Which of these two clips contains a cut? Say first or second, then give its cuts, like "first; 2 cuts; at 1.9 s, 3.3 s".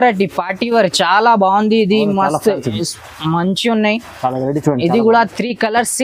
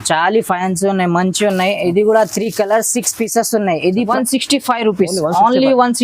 second; 1 cut; at 4.1 s